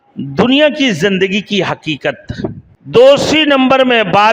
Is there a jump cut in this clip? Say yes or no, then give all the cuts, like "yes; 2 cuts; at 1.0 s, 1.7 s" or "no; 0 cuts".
yes; 1 cut; at 2.7 s